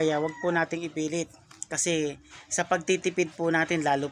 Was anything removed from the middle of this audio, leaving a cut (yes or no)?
no